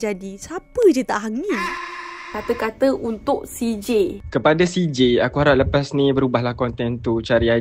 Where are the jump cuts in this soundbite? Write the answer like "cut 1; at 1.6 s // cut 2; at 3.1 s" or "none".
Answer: cut 1; at 1.8 s